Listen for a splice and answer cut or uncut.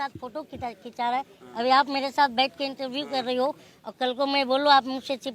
uncut